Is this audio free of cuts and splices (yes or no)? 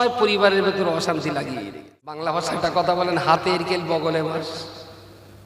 no